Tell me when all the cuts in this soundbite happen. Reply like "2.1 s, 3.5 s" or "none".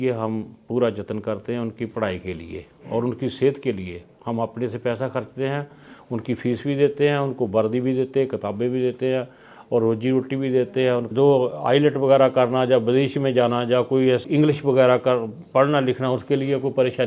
11.1 s, 14.2 s